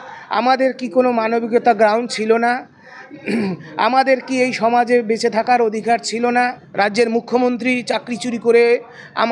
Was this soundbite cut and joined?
yes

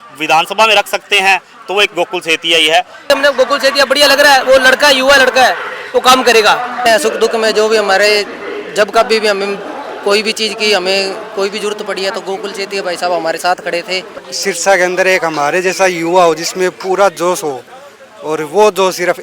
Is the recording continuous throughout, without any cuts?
no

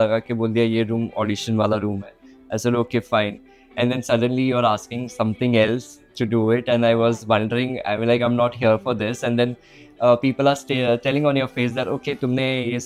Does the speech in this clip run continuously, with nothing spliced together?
yes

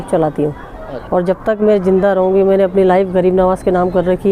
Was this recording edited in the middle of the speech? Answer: yes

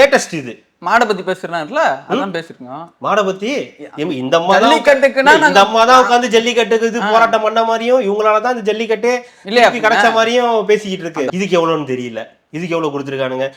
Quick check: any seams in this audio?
yes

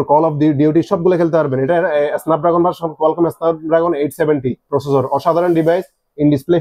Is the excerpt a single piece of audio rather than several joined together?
yes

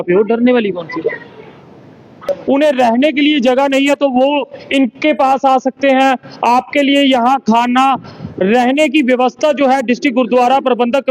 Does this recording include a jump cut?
yes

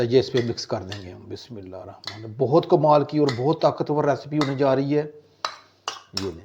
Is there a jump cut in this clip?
no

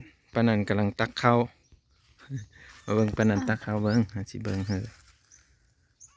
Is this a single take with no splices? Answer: yes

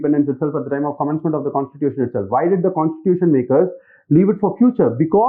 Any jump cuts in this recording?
no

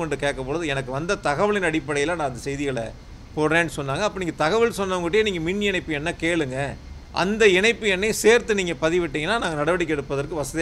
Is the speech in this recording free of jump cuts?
yes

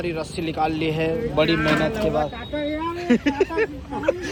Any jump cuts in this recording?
no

